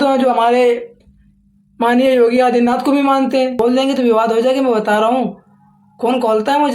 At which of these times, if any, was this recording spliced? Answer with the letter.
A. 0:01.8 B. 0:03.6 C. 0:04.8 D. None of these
B